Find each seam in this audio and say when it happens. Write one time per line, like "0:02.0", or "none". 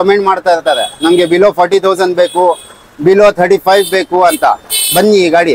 none